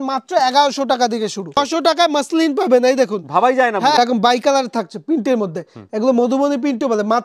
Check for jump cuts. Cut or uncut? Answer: cut